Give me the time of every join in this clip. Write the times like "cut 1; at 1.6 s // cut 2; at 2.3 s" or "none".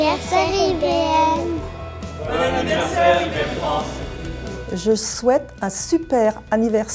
none